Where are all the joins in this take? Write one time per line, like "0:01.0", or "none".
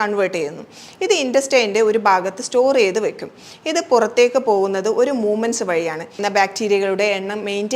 0:06.2